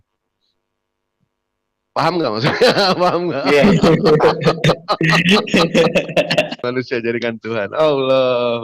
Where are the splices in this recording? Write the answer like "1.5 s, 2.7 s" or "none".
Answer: 6.6 s